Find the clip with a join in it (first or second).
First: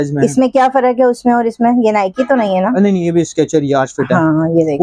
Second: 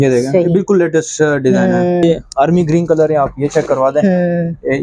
second